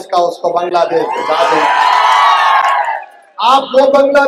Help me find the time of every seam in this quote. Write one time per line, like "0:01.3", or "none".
none